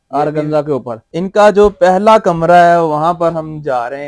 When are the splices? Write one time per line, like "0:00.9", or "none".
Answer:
0:01.0